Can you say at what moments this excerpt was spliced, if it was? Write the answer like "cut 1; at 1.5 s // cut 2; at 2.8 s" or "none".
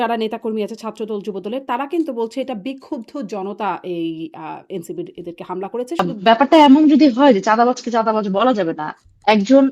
cut 1; at 6.1 s